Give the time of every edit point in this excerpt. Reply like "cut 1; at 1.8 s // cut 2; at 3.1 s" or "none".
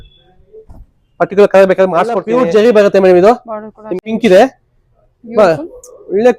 cut 1; at 2.2 s // cut 2; at 4.0 s